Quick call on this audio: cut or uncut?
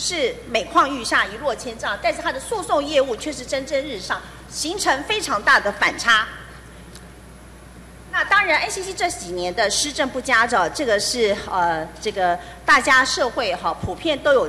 uncut